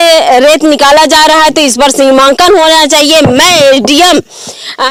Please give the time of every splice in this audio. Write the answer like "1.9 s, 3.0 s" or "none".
none